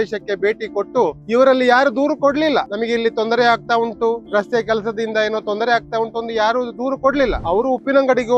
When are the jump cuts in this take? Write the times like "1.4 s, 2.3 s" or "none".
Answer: 1.2 s, 2.7 s, 4.2 s, 7.4 s